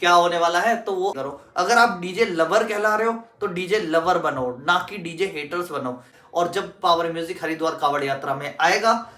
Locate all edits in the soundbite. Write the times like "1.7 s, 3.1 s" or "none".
1.2 s, 6.1 s